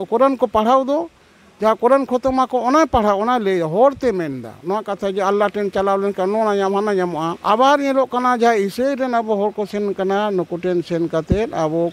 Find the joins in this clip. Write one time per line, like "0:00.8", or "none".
0:07.4